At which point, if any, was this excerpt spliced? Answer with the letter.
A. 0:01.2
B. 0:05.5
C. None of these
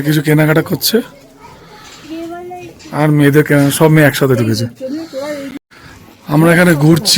B